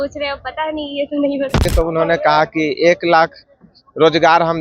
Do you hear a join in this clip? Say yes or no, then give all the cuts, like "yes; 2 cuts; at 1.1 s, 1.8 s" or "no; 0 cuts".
yes; 1 cut; at 1.7 s